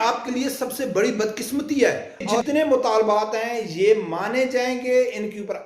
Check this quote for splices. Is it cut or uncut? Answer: cut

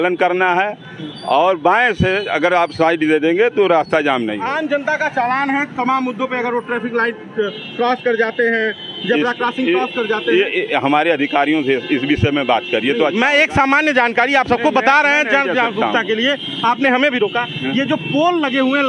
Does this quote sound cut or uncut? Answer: cut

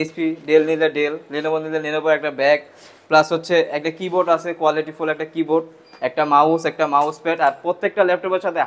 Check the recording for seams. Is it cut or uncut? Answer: uncut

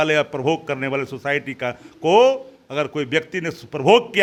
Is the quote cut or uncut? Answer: uncut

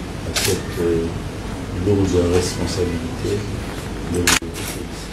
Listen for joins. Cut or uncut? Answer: uncut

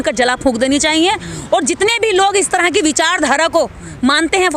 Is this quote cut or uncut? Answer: uncut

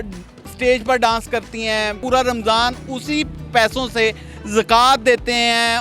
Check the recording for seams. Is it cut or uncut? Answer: cut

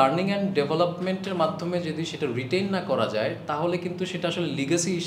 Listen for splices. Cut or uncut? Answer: uncut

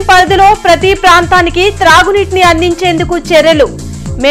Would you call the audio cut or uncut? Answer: uncut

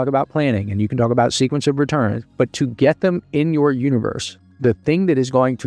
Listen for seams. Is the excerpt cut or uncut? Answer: cut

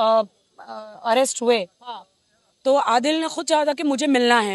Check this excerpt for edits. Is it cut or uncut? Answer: uncut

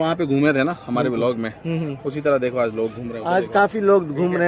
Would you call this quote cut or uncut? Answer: uncut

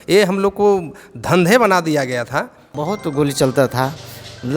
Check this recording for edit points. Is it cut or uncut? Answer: cut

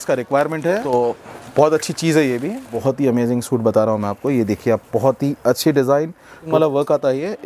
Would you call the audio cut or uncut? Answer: cut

